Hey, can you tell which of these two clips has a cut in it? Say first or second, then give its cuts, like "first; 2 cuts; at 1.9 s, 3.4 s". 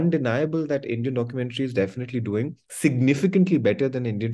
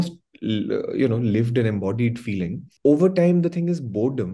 second; 1 cut; at 2.7 s